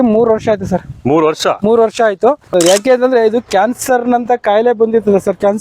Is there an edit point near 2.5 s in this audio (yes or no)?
yes